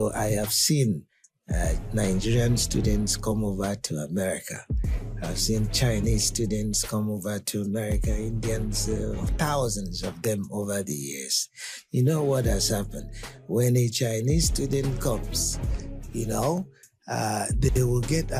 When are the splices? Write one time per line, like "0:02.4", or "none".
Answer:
none